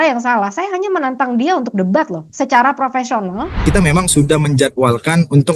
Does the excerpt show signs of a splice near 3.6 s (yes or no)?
yes